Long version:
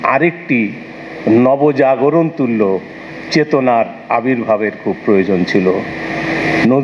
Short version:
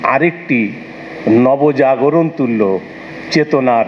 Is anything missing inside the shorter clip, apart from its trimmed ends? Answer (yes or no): no